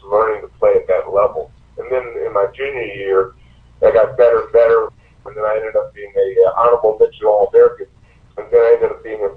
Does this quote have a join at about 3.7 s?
no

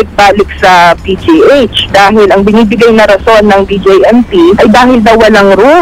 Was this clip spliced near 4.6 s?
yes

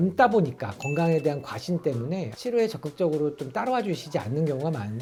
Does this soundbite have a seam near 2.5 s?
no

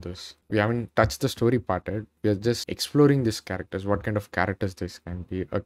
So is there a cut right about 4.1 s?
no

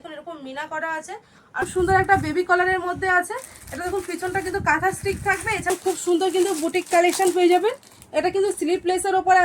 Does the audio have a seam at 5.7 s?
yes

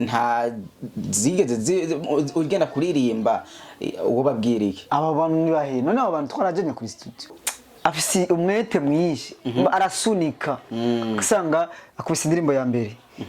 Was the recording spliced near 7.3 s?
yes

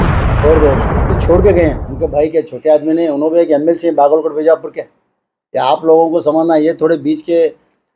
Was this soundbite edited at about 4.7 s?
no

